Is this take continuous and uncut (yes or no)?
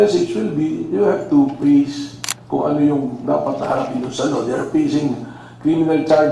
yes